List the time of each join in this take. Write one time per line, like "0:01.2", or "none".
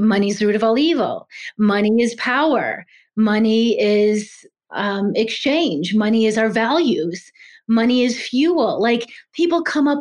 0:04.6